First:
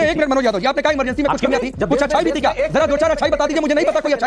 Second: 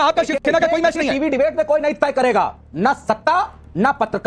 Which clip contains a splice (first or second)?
first